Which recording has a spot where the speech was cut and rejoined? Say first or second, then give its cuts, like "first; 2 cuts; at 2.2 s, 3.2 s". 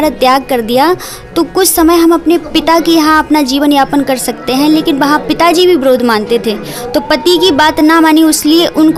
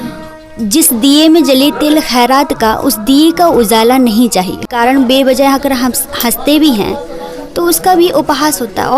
second; 1 cut; at 4.7 s